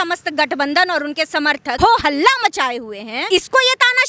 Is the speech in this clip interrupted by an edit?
yes; 2 cuts; at 1.7 s, 3.1 s

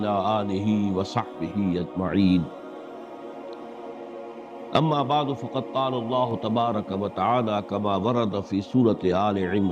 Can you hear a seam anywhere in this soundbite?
yes; 2 cuts; at 2.5 s, 4.1 s

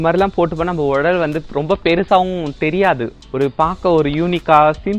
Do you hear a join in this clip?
yes; 1 cut; at 3.2 s

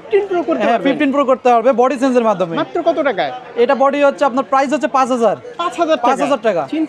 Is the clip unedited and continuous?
yes; 0 cuts

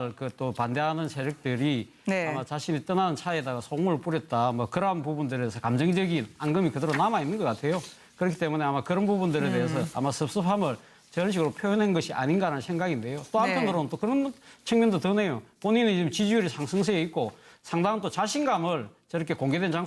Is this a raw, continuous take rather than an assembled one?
yes; 0 cuts

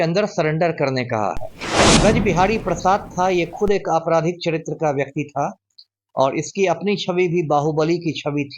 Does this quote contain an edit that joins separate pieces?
yes; 1 cut; at 2.0 s

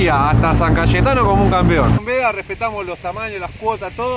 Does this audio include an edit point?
yes; 1 cut; at 2.0 s

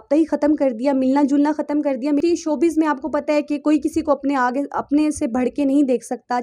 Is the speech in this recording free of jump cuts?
no; 1 cut; at 2.2 s

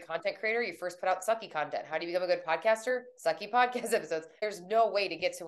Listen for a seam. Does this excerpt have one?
yes; 1 cut; at 4.3 s

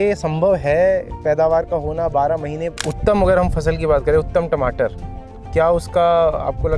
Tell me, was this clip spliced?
yes; 1 cut; at 2.7 s

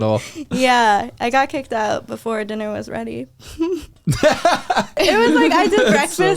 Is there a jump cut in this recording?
yes; 1 cut; at 5.0 s

